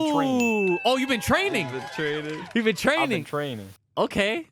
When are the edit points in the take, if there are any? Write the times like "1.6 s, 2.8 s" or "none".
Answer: none